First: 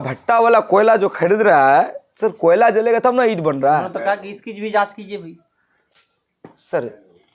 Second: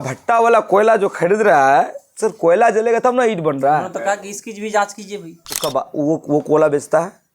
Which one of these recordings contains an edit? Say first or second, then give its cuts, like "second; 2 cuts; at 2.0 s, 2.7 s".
second; 1 cut; at 5.5 s